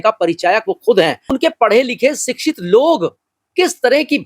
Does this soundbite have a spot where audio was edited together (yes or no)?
yes